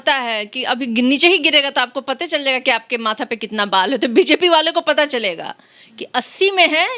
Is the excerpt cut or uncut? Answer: uncut